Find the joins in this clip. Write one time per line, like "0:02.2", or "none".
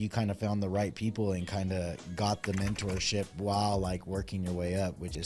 none